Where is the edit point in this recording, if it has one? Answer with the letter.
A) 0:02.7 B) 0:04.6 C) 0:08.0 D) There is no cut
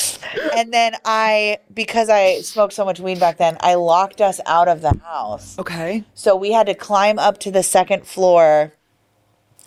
D